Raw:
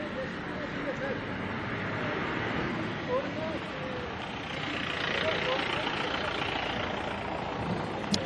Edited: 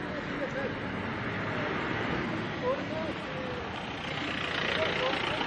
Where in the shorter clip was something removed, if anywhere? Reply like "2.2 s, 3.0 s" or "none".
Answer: none